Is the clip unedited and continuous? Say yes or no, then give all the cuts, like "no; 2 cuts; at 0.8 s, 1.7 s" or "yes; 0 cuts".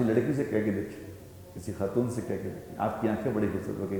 yes; 0 cuts